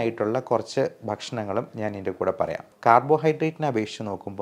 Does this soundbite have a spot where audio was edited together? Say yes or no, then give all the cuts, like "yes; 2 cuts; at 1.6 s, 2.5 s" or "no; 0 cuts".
yes; 1 cut; at 2.7 s